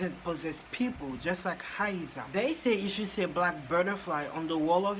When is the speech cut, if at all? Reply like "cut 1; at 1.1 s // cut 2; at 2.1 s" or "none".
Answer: cut 1; at 2.2 s